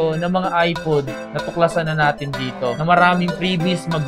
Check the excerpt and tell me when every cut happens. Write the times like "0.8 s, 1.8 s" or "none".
none